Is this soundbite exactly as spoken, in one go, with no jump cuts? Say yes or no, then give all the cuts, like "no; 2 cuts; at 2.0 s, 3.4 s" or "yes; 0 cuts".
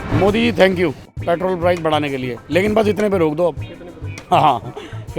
no; 1 cut; at 1.1 s